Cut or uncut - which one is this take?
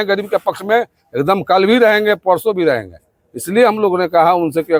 uncut